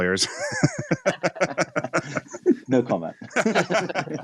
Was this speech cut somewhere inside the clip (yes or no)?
yes